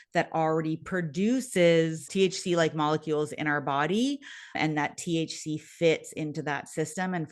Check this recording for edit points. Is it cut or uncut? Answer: cut